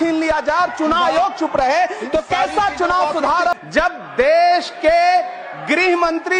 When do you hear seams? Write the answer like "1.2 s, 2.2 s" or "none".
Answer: 3.6 s

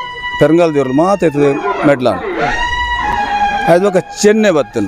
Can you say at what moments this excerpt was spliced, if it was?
none

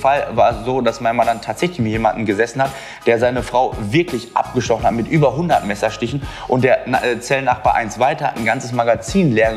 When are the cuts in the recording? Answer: none

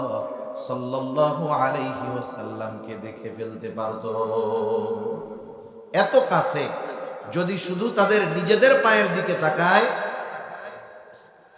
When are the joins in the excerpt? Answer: none

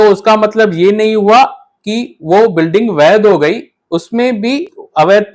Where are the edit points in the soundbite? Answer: none

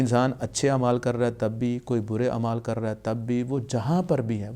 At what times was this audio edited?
none

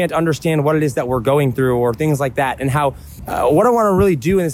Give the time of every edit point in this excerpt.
3.1 s

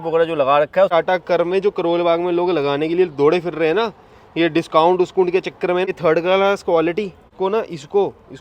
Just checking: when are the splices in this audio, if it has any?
0.9 s, 5.9 s, 7.2 s

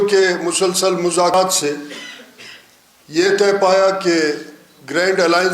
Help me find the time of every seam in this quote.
1.3 s

